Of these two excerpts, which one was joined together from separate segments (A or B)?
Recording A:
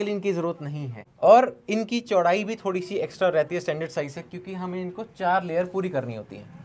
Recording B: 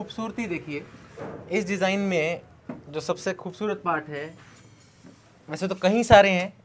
A